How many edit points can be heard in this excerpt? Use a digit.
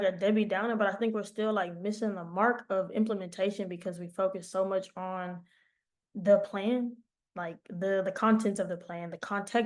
0